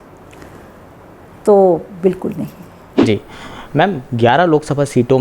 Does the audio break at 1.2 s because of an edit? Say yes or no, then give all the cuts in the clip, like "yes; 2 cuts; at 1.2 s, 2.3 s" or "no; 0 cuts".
no; 1 cut; at 2.9 s